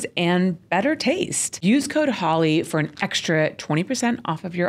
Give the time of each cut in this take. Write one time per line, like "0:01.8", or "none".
0:01.5